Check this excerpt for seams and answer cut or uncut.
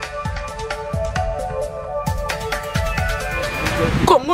cut